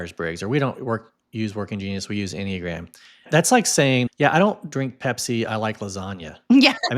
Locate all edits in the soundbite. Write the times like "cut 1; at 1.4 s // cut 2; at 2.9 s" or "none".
cut 1; at 3.3 s // cut 2; at 4.1 s